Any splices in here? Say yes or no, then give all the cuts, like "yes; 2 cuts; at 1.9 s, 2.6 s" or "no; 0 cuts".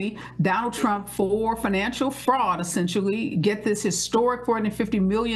no; 0 cuts